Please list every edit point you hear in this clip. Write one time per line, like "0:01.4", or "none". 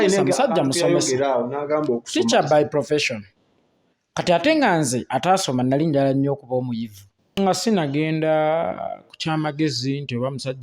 0:07.4